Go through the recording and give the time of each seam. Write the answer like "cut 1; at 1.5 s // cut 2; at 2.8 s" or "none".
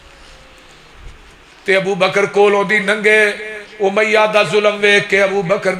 cut 1; at 1.4 s